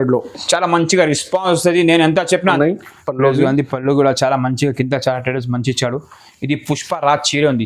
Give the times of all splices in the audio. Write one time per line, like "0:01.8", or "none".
0:02.6

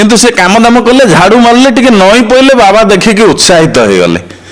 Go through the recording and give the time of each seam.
none

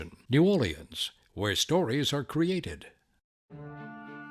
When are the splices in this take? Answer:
0:03.3

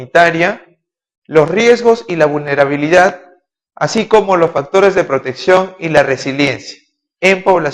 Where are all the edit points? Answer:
0:02.8

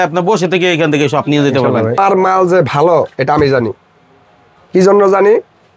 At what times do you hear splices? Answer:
0:02.0

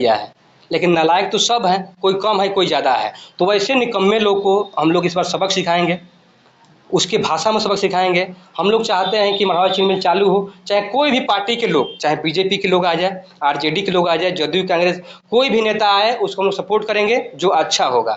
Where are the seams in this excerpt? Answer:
none

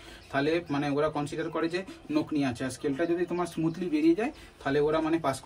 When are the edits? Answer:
none

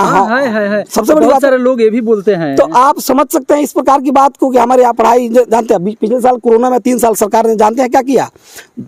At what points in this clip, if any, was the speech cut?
none

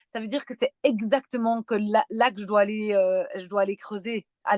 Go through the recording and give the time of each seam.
none

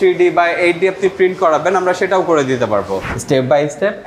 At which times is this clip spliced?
0:03.1

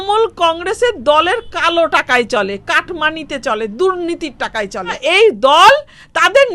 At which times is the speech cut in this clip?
0:05.0

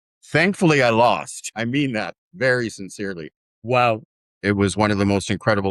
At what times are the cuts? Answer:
0:04.4

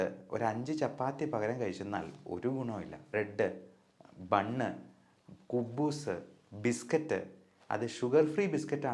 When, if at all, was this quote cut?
0:03.1

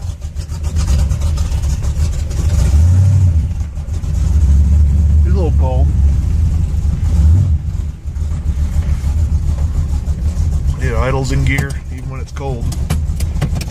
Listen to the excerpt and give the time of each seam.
0:07.5

